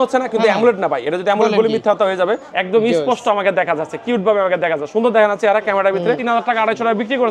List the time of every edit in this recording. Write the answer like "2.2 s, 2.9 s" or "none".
2.5 s, 6.2 s

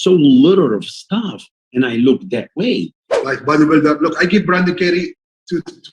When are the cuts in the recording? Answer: 3.1 s

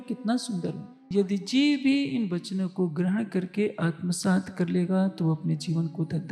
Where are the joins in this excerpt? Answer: 1.1 s

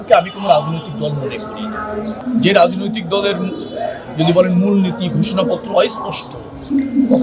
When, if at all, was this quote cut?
2.2 s

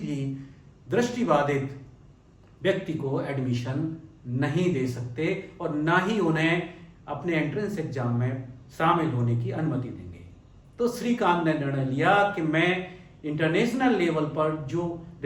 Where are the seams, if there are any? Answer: none

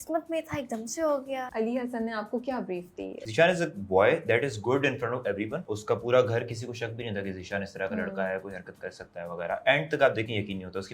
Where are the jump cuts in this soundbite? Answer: 1.5 s, 3.2 s, 5.7 s

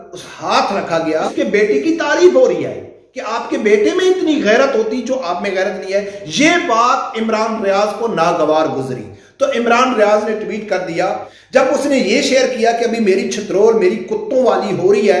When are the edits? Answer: 1.3 s, 11.3 s

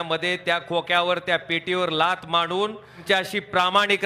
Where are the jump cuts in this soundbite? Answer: 3.0 s

